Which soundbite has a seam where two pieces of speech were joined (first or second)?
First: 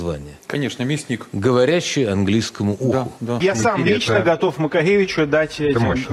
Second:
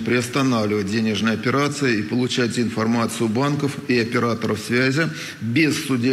first